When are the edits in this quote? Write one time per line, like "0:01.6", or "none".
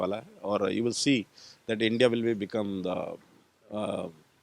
none